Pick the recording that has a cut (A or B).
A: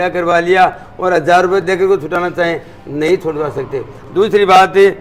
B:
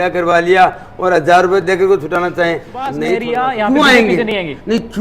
B